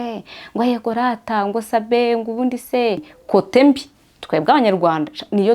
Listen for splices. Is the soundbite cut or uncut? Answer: cut